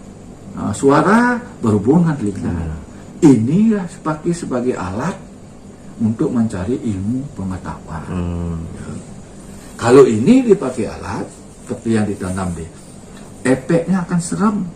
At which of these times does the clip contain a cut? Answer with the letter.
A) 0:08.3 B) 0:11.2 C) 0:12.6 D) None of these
D